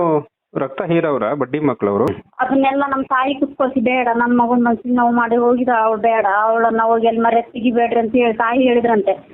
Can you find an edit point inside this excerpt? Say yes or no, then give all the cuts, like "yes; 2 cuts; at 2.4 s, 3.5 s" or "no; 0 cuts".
yes; 1 cut; at 2.1 s